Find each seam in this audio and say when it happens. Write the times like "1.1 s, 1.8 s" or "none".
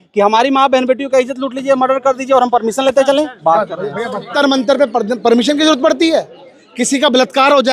4.3 s